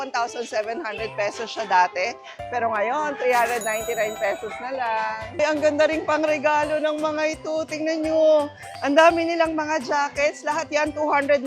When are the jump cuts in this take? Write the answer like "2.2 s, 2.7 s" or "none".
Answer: 5.4 s